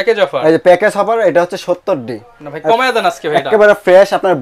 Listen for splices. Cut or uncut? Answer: uncut